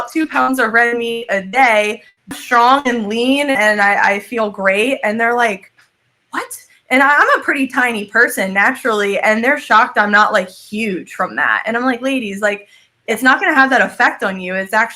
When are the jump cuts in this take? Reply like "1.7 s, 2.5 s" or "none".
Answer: 2.3 s